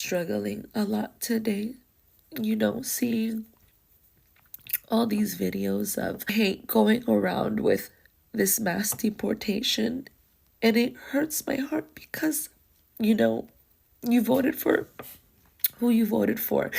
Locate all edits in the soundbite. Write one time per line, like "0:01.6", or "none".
0:06.3